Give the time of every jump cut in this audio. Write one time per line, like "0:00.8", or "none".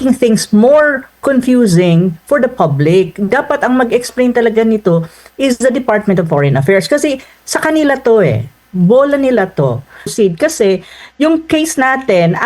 0:10.1